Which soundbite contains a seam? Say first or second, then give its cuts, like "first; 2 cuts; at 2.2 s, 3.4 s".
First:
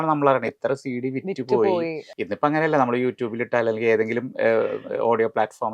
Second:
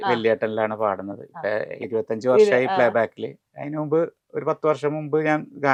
first; 1 cut; at 2.1 s